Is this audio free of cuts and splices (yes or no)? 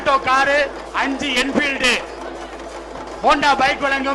yes